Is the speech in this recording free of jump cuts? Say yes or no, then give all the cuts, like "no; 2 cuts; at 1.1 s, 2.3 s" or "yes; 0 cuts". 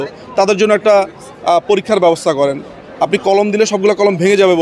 yes; 0 cuts